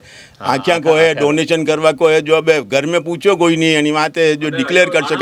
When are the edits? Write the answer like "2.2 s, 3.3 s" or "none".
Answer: none